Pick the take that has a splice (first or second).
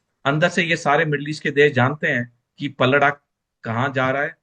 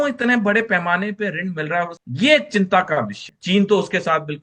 second